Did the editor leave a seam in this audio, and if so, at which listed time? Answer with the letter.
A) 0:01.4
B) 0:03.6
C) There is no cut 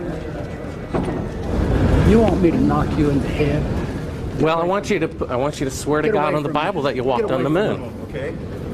A